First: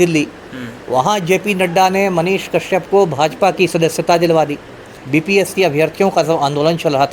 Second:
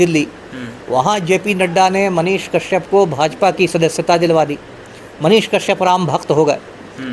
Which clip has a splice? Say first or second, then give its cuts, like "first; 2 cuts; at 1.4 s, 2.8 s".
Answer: first; 1 cut; at 5.0 s